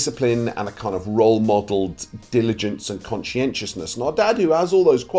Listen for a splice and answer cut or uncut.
uncut